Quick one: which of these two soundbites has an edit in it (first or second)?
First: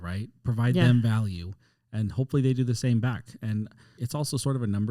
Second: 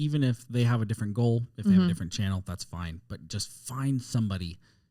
first